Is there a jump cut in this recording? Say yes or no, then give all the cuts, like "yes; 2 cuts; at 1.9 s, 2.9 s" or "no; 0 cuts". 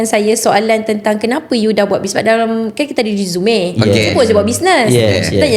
no; 0 cuts